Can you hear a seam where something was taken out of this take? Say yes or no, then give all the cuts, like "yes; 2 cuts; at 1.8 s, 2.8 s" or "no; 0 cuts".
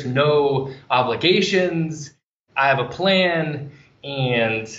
yes; 1 cut; at 2.4 s